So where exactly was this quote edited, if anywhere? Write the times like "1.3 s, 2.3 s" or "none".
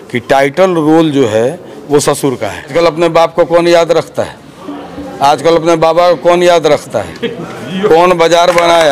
2.7 s